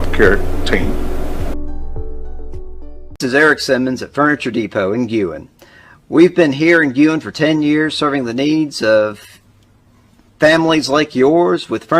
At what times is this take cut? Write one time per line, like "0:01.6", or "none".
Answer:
0:03.1